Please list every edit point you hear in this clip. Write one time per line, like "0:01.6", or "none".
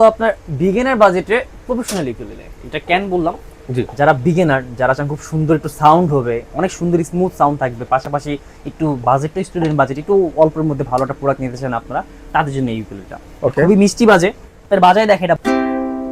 0:14.5
0:15.4